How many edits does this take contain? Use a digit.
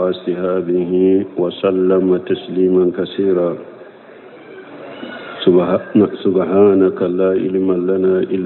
0